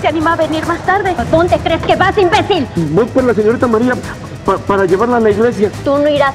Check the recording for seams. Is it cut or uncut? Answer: cut